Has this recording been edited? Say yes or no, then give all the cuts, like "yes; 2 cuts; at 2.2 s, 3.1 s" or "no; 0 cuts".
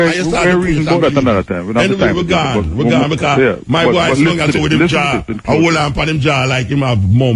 no; 0 cuts